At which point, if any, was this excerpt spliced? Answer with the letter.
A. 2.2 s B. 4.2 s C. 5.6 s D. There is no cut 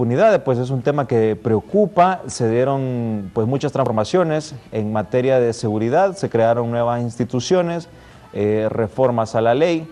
B